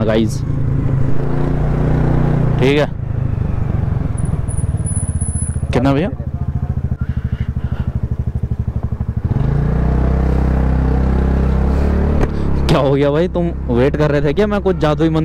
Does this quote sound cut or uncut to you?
uncut